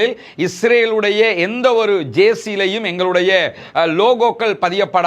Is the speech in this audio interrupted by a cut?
yes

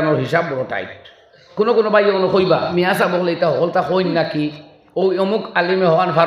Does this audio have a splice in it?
yes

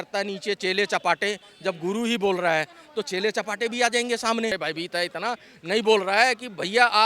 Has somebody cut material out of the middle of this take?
yes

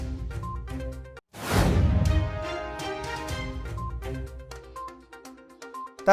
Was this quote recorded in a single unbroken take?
no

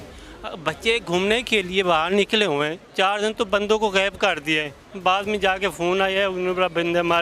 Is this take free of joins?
no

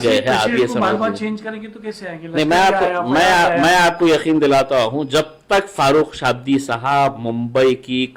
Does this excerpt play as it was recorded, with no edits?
yes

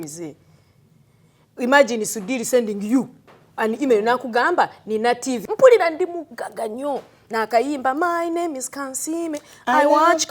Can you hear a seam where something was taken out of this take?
yes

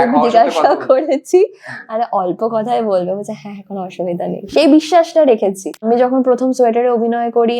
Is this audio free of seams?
no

